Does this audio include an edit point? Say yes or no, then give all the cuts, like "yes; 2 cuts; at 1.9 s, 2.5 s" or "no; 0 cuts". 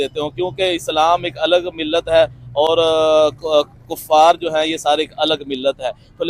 no; 0 cuts